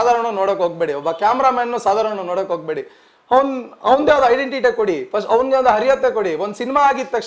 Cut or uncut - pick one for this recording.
uncut